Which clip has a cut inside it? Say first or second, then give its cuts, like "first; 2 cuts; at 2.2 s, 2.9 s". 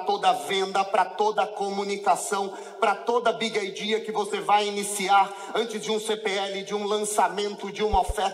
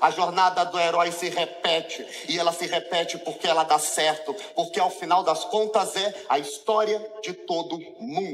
second; 1 cut; at 2.7 s